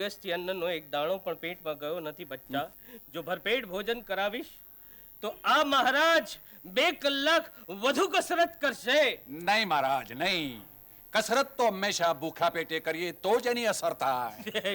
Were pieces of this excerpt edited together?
yes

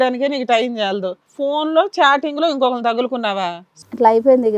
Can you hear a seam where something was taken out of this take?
yes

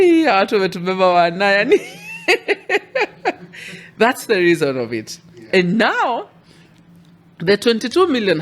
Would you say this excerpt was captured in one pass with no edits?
yes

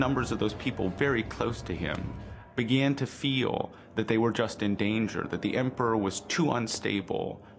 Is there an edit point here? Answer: yes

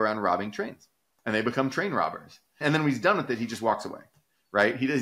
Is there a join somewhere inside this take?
yes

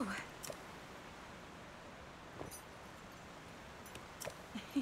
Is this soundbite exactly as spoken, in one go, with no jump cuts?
yes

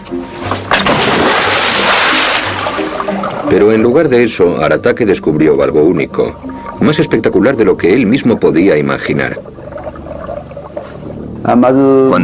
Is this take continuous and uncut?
yes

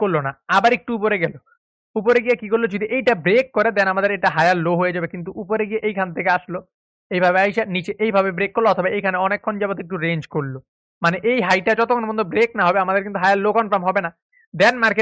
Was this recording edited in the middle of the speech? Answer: no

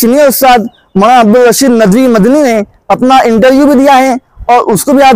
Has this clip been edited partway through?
no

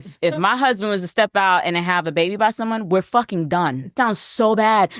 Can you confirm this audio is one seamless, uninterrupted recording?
no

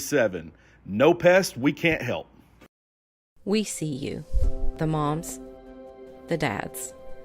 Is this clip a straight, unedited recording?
no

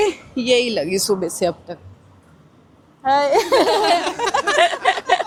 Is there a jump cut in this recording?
no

